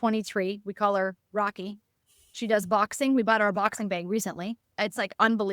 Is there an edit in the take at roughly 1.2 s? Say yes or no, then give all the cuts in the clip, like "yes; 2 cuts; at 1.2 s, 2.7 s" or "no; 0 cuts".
no; 1 cut; at 4.6 s